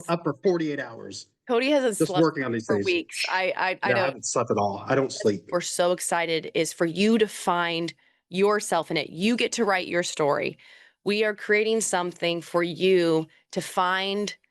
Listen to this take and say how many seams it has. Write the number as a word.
one